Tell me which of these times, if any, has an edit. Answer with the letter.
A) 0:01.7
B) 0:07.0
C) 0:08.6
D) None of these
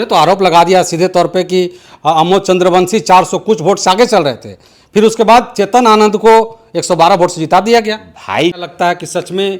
C